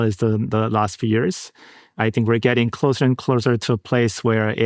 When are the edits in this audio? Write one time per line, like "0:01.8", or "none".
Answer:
0:01.9